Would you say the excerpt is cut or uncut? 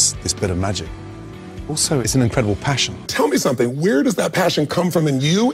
cut